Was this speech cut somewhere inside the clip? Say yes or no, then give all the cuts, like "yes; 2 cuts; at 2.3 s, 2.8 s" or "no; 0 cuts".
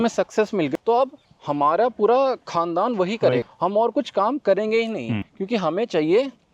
no; 0 cuts